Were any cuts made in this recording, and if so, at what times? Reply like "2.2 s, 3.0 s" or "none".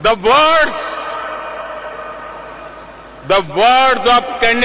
2.7 s